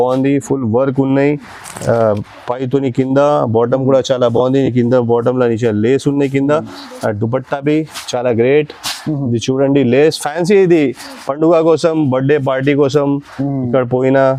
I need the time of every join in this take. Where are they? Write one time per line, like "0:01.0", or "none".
none